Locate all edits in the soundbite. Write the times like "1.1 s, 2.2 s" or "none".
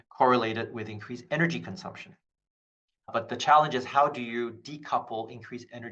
none